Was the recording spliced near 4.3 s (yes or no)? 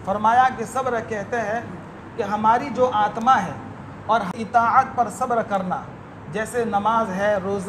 yes